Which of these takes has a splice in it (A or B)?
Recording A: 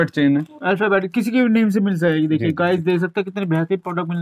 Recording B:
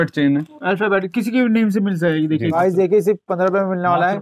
B